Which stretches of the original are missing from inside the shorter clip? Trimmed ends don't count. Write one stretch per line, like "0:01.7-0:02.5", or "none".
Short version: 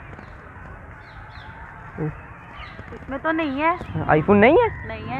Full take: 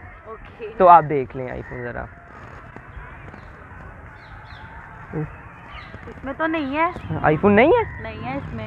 none